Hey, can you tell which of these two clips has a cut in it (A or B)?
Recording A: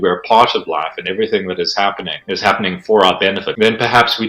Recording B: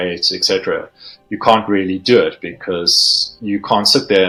A